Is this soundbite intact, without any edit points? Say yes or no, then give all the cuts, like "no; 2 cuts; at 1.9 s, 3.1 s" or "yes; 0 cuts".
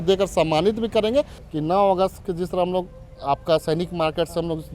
no; 1 cut; at 1.4 s